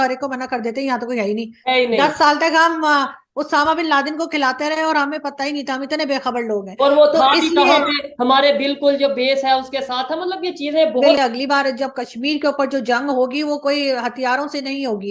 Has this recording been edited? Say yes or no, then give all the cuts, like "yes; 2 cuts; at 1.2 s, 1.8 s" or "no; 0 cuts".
yes; 1 cut; at 11.2 s